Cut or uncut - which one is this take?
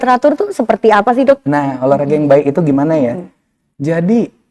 uncut